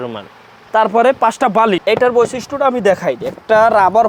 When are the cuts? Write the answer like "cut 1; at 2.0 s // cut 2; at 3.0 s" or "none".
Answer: cut 1; at 1.8 s